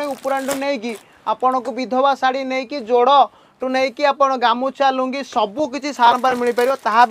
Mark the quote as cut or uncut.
uncut